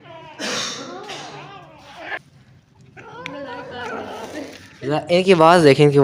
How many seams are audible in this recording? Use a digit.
1